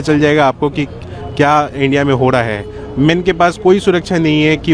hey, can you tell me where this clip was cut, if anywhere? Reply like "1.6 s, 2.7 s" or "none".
none